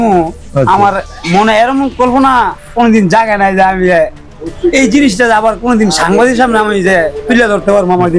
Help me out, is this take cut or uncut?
uncut